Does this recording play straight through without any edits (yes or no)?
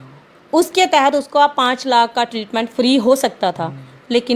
yes